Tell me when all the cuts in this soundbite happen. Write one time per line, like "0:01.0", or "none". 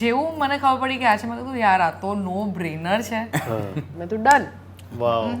0:03.9